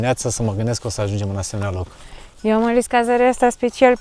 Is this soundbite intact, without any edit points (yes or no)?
yes